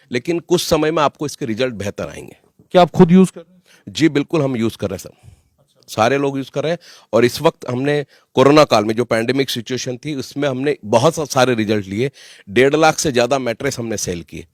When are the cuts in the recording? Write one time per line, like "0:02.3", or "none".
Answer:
none